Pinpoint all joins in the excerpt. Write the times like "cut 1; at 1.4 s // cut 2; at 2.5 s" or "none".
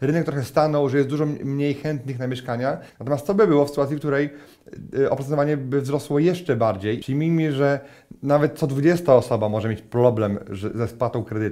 cut 1; at 2.9 s // cut 2; at 7.0 s

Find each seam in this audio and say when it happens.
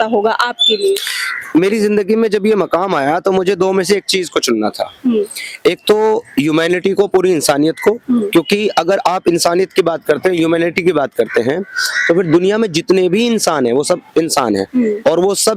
none

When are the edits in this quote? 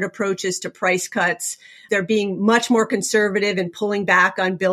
cut 1; at 1.7 s

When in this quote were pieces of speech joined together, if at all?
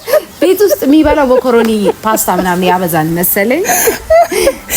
none

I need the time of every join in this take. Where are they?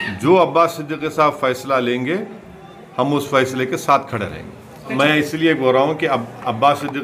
cut 1; at 4.9 s

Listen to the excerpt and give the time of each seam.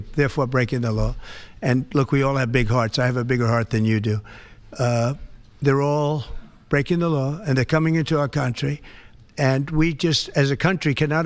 none

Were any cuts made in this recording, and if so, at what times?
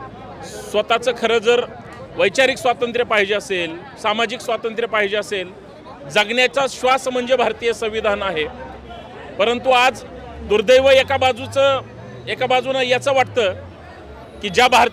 none

